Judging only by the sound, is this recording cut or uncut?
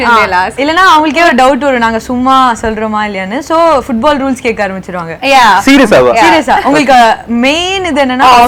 uncut